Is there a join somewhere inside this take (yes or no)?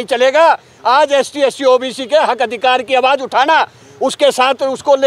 no